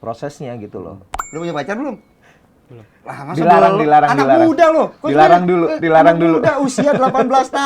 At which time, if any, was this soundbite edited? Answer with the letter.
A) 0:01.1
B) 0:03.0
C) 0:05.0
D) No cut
A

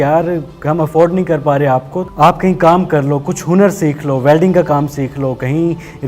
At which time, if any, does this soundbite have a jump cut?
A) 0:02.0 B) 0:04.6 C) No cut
A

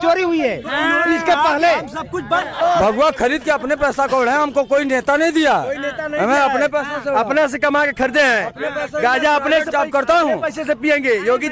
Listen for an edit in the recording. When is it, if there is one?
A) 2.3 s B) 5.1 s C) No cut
A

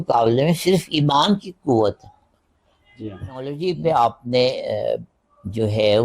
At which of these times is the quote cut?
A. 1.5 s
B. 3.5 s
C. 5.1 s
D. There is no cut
B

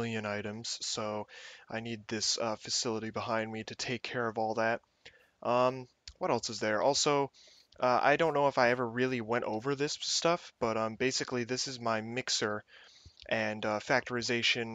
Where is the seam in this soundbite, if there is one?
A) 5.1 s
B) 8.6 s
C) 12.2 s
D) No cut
A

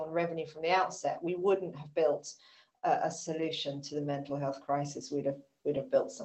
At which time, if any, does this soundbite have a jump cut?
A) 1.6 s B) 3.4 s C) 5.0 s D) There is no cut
D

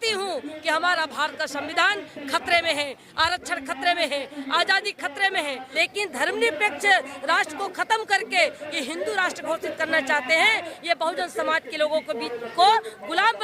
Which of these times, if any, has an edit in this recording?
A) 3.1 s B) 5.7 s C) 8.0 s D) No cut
B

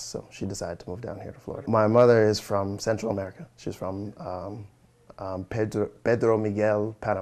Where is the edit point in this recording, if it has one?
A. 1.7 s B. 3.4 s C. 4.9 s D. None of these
A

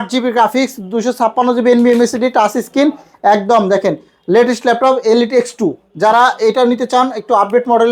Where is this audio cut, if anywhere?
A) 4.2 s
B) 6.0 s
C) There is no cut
C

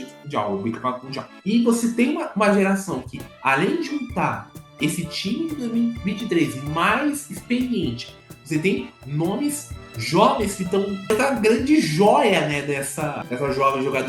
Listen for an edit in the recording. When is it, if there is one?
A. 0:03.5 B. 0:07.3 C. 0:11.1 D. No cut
C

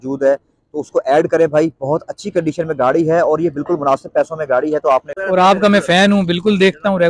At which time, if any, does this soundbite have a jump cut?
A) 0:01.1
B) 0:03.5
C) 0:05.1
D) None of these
C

